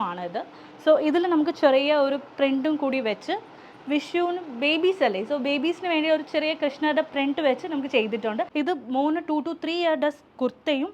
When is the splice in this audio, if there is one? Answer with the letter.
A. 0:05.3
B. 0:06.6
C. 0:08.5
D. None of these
C